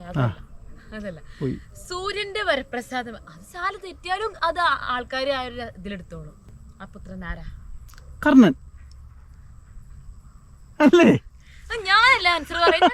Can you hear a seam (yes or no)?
yes